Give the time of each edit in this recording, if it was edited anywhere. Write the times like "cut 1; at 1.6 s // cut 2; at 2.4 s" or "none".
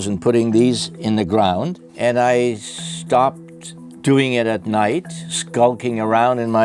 cut 1; at 1.8 s